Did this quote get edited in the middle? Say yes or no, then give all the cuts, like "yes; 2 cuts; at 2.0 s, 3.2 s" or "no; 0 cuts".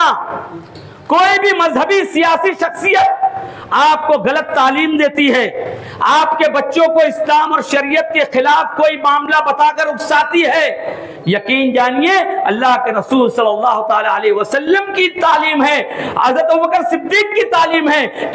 no; 0 cuts